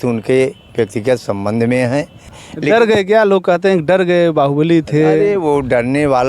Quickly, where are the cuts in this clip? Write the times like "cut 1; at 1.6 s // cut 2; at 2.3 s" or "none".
cut 1; at 2.4 s